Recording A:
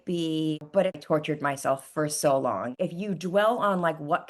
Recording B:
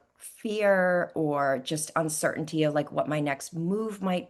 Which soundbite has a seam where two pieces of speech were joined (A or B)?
A